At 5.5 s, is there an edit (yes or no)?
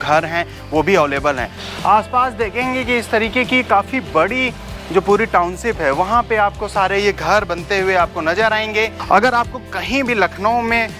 no